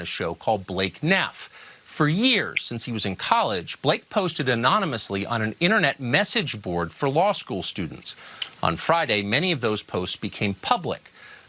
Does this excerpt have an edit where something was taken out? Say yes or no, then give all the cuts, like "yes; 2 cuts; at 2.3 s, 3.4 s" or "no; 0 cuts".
yes; 1 cut; at 7.9 s